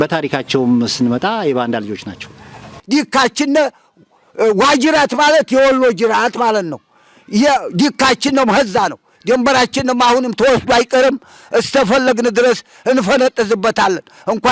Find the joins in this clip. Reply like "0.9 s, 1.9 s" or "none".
2.8 s